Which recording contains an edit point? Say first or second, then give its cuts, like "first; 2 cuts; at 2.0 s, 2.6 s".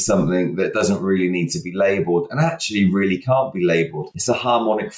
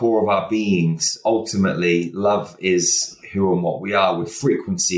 first; 1 cut; at 4.0 s